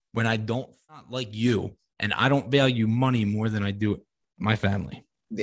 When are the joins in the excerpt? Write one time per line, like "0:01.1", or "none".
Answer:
0:01.0